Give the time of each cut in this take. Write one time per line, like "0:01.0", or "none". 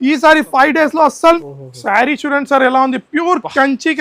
0:01.4